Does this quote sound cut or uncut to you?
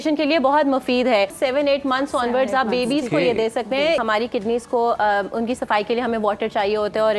cut